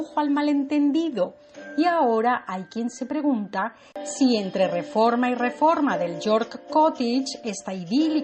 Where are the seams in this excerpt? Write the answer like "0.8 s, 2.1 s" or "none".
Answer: none